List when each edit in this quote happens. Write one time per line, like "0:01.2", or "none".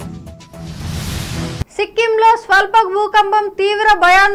none